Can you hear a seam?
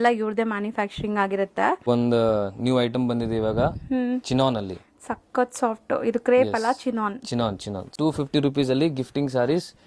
yes; 2 cuts; at 1.9 s, 7.9 s

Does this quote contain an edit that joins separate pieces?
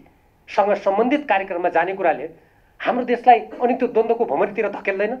no; 0 cuts

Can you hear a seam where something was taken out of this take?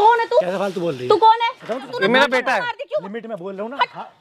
yes; 1 cut; at 1.8 s

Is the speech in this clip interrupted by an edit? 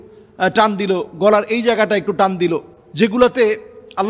yes; 1 cut; at 2.8 s

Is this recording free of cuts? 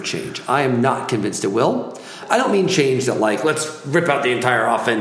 no; 1 cut; at 2.2 s

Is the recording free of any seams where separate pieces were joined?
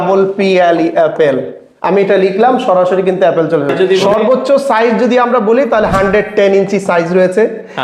no; 1 cut; at 3.8 s

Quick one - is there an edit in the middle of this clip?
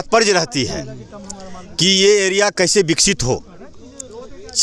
no; 0 cuts

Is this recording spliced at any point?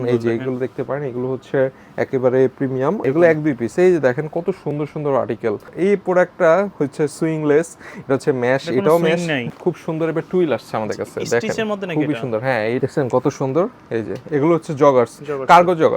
yes; 4 cuts; at 3.0 s, 5.7 s, 9.5 s, 12.8 s

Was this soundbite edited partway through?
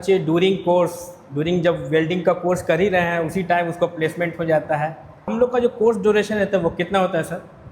yes; 1 cut; at 5.3 s

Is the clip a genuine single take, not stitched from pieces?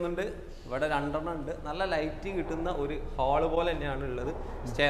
yes; 0 cuts

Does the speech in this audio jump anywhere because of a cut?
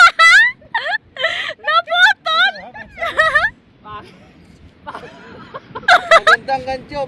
no; 0 cuts

